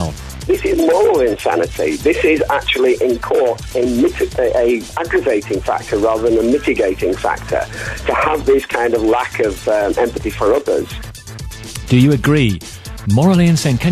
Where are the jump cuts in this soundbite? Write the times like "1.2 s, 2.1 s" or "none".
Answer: 1.1 s